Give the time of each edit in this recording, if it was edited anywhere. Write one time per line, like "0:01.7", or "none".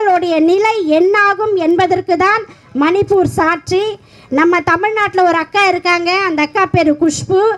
none